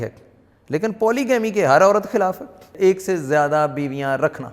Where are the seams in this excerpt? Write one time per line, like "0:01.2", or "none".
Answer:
0:02.7